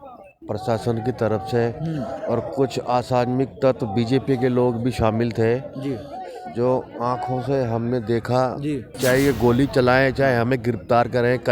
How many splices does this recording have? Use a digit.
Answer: 1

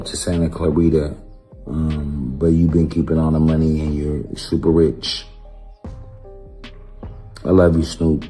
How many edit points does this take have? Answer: 2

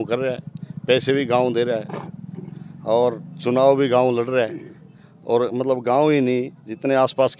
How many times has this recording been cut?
0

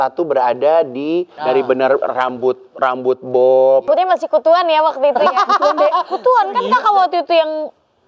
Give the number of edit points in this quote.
2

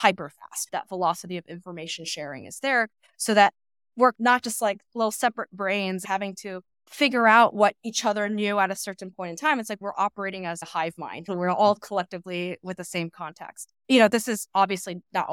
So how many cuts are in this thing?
3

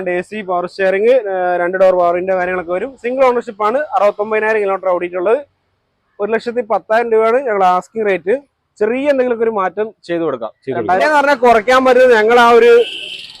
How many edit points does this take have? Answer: 1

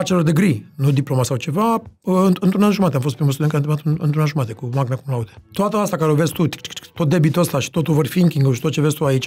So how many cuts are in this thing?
1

